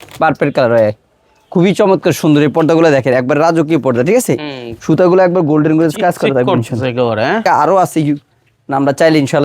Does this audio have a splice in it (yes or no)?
yes